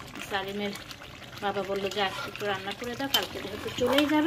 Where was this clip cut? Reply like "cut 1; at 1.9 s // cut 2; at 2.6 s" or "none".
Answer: none